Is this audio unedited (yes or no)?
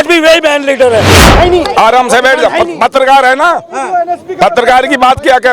no